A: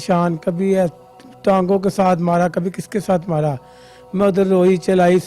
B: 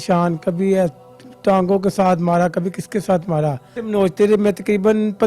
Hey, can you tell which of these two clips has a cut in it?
B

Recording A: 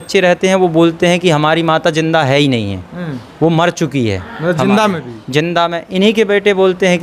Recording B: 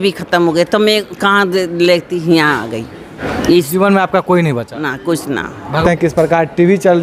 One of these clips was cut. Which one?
B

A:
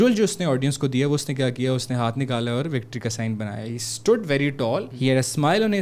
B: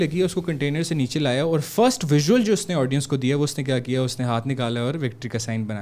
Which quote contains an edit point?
A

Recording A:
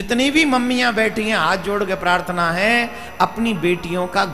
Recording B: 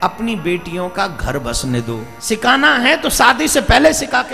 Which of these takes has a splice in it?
B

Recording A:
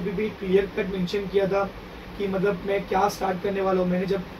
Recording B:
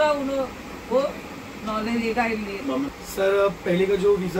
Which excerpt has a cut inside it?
B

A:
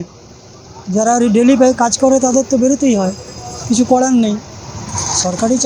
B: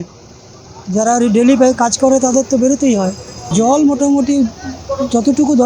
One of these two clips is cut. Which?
B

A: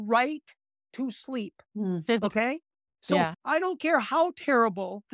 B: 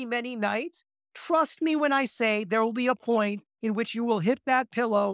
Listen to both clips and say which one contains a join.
A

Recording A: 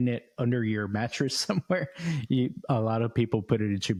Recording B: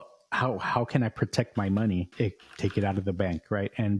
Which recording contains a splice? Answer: B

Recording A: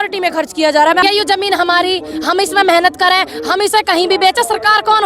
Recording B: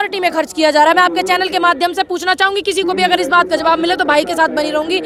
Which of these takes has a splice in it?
A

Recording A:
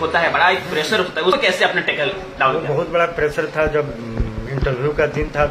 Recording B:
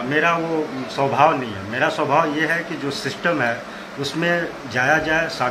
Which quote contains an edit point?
A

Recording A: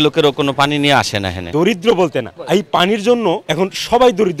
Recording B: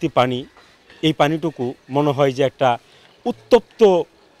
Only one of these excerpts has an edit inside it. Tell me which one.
A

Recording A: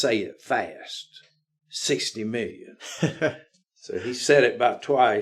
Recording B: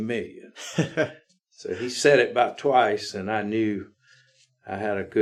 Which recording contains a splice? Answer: A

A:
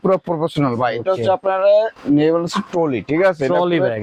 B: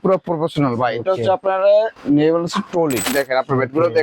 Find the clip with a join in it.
B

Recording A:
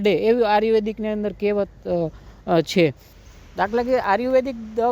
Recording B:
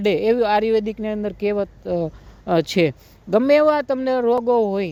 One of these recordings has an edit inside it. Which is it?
A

